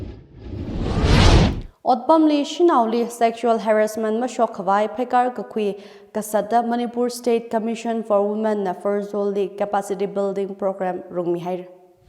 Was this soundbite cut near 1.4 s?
no; 0 cuts

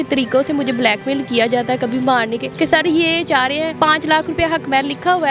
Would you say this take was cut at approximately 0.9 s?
no; 2 cuts; at 2.4 s, 3.7 s

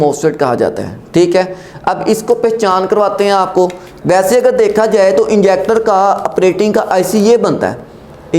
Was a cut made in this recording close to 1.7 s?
no; 1 cut; at 3.9 s

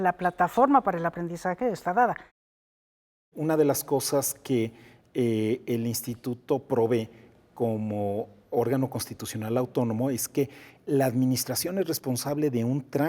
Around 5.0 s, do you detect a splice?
no; 1 cut; at 2.9 s

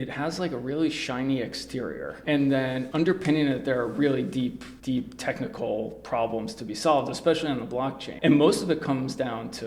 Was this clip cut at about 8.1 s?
yes; 2 cuts; at 4.7 s, 8.1 s

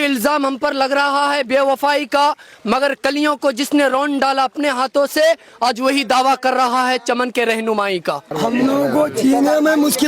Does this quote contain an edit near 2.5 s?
no; 1 cut; at 8.3 s

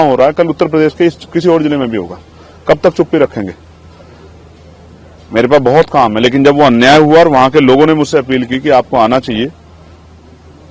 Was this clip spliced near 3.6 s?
no; 0 cuts

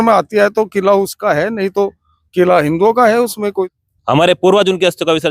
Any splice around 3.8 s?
yes; 1 cut; at 3.8 s

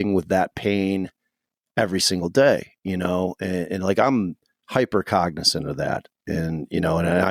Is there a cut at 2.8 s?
no; 0 cuts

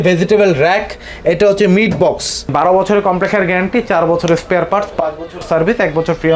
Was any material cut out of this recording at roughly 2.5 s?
yes; 1 cut; at 2.5 s

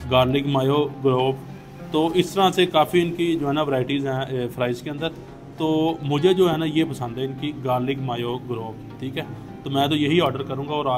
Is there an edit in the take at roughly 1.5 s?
no; 0 cuts

